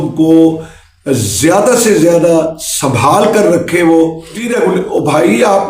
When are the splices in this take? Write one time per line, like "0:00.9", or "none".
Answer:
0:04.5